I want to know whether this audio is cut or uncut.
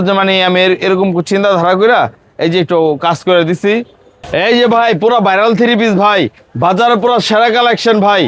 cut